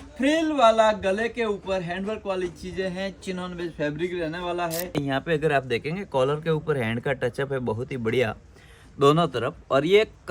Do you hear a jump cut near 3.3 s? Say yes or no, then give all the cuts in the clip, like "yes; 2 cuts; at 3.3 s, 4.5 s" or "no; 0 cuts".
no; 1 cut; at 4.9 s